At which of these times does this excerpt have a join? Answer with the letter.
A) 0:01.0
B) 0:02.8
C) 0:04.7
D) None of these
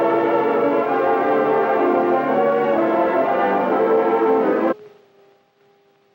D